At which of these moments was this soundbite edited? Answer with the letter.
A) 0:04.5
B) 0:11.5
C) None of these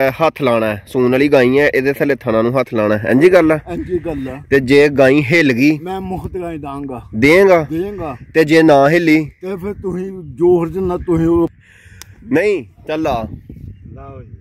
B